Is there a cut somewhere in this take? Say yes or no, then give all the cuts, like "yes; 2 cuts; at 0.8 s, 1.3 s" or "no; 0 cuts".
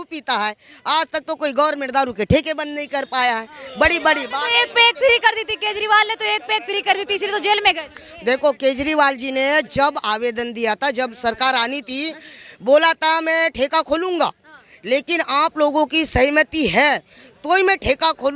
no; 0 cuts